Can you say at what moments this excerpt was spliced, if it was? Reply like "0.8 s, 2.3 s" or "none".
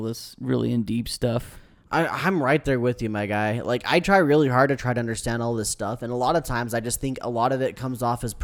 none